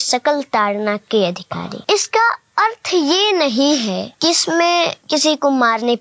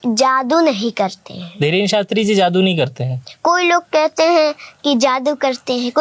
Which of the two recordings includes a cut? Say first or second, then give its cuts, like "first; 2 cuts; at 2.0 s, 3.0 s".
first; 3 cuts; at 1.7 s, 4.1 s, 5.0 s